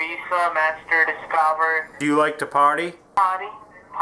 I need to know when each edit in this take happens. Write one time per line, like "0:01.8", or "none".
0:01.9
0:03.2